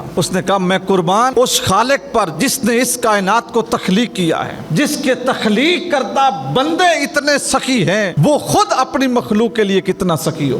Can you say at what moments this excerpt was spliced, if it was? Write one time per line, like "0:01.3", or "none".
0:01.3
0:04.6
0:08.1